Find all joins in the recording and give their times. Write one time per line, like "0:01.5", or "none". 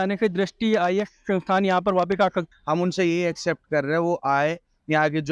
0:02.5

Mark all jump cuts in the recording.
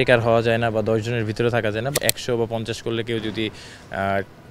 0:01.9

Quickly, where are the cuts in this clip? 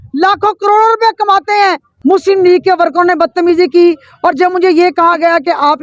0:01.9

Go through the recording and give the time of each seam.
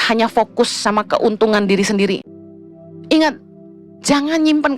0:02.2

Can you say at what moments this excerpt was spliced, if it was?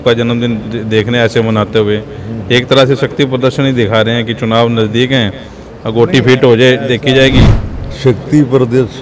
0:07.4

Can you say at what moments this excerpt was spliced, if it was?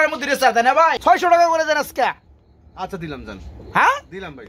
0:01.1

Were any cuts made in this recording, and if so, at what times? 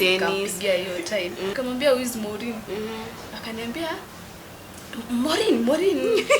0:01.5

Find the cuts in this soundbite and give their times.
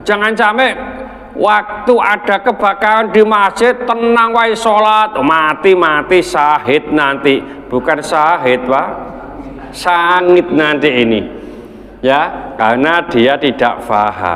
none

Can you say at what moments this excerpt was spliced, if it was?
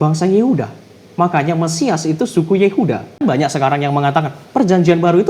0:03.2

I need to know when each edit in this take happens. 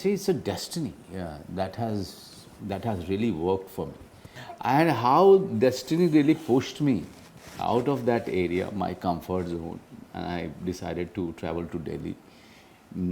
none

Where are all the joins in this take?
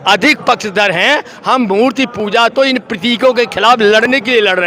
none

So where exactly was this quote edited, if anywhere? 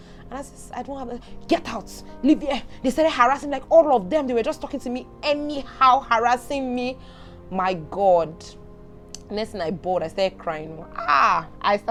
none

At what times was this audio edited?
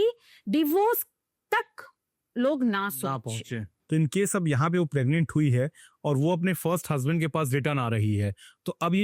0:03.7

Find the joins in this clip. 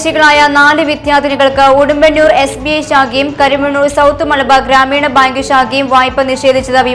none

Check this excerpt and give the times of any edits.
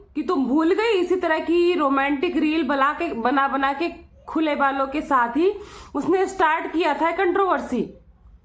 none

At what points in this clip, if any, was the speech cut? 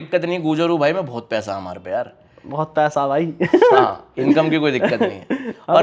none

